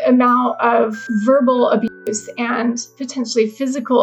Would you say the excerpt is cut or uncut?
cut